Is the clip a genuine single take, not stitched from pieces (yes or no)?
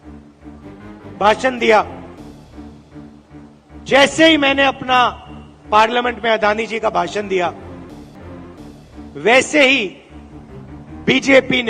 no